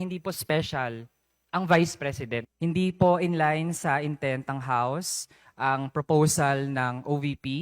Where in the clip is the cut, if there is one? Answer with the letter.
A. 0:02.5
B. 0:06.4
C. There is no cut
A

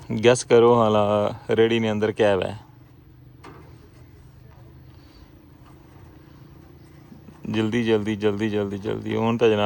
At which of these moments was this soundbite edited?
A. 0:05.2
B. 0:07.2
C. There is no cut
C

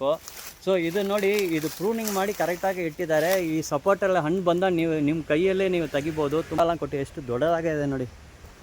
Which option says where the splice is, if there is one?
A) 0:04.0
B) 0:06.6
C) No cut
B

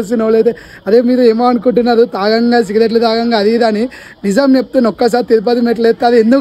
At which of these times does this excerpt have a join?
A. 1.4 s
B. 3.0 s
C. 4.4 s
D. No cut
D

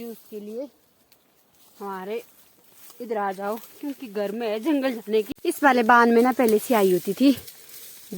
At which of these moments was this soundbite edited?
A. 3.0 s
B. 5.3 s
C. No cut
B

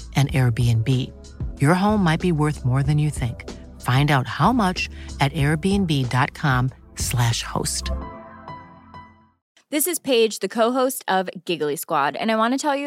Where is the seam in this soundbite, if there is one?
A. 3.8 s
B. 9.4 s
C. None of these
B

